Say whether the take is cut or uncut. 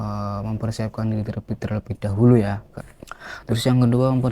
cut